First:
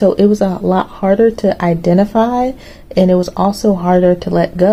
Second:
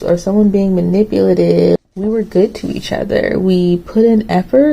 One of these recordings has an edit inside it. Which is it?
second; 1 cut; at 1.8 s

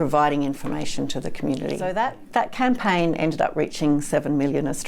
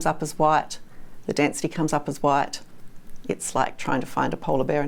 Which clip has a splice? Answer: first; 1 cut; at 1.9 s

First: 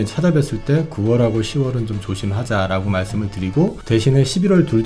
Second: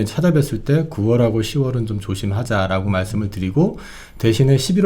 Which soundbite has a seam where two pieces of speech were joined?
first; 1 cut; at 3.8 s

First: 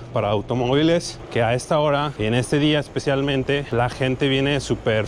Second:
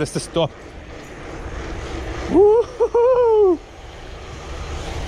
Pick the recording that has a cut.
first; 3 cuts; at 1.2 s, 2.1 s, 3.7 s

